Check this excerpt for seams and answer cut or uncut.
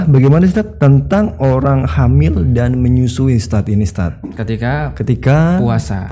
uncut